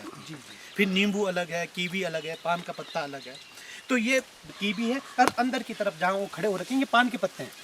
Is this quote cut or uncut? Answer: cut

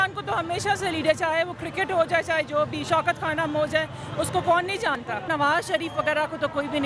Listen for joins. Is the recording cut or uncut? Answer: cut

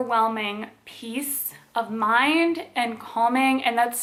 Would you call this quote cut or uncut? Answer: uncut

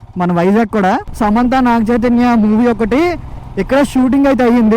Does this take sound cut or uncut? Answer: cut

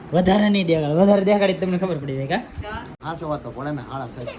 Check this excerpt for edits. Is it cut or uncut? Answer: cut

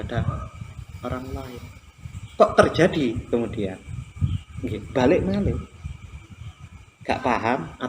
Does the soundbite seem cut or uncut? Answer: cut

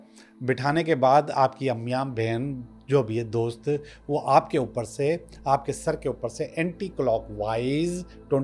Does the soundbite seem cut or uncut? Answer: uncut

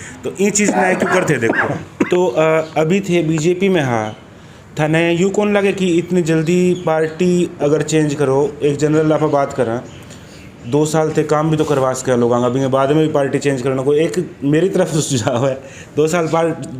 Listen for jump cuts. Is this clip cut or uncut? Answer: cut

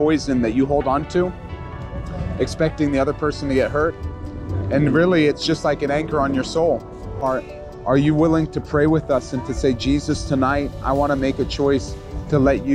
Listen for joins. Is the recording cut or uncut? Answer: cut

